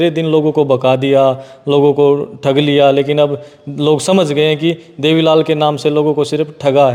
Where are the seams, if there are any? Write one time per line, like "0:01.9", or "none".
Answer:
none